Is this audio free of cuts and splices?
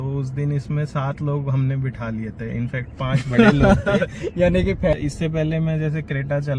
no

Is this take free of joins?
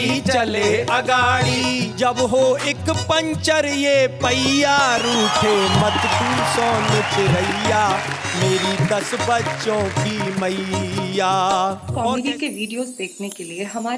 no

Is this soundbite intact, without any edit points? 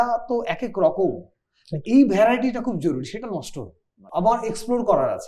no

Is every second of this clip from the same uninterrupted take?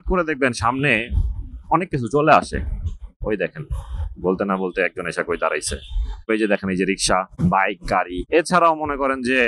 no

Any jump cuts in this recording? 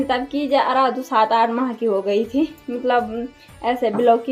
no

